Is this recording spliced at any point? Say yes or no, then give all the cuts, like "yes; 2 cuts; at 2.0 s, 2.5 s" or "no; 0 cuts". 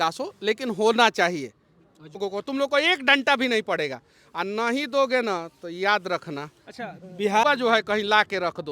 yes; 2 cuts; at 2.2 s, 7.4 s